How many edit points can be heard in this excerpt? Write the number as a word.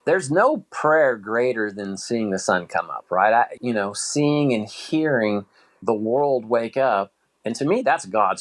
two